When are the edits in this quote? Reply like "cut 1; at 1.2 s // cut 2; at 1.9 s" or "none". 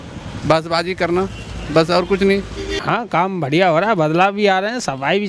cut 1; at 2.7 s